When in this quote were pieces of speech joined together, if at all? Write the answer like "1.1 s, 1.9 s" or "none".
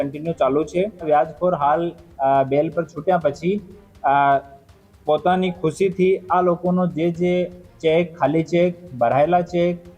1.1 s